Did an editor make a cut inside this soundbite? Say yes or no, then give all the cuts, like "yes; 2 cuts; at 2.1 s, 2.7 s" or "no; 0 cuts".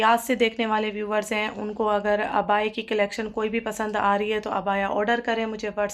no; 0 cuts